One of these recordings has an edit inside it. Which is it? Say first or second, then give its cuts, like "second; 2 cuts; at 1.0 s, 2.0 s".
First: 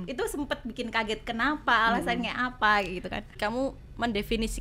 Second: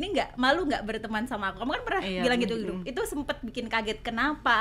first; 1 cut; at 3.3 s